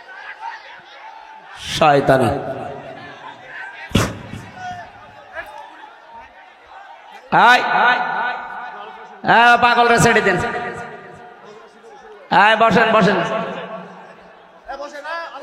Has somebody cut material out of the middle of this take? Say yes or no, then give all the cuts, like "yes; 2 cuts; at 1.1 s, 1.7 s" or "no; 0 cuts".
no; 0 cuts